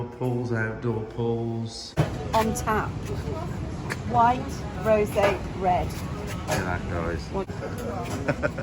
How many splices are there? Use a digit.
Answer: 2